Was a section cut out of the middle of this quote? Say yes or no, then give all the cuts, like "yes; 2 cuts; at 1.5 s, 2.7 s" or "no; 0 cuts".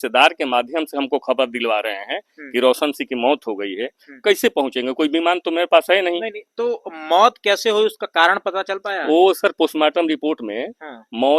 no; 0 cuts